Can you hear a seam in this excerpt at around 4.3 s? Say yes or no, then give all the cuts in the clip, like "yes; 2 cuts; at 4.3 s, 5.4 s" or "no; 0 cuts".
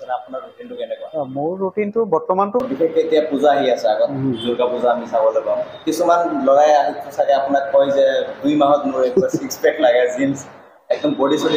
no; 1 cut; at 2.6 s